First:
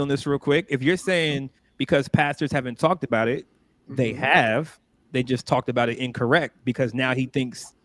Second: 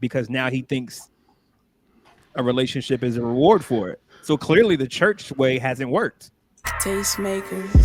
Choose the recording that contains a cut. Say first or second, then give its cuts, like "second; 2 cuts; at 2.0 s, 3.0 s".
second; 1 cut; at 6.6 s